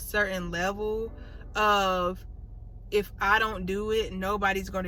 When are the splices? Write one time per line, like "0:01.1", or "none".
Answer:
none